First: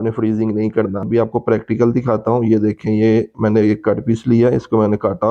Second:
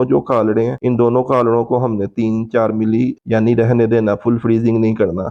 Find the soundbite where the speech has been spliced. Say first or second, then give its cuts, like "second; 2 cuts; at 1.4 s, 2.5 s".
first; 1 cut; at 1.1 s